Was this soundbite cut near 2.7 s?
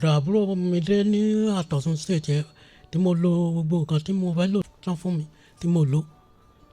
no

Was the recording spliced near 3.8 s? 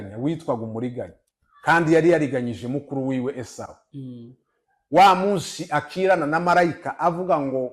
no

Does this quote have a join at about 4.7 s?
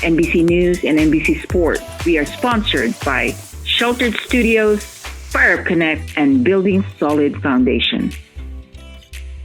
no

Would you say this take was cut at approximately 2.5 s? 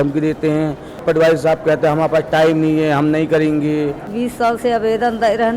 no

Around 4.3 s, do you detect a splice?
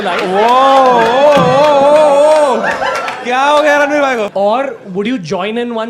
yes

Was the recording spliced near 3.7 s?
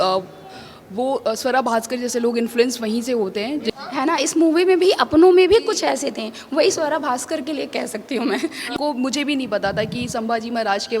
yes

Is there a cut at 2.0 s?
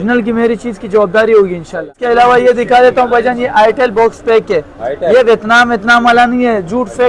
yes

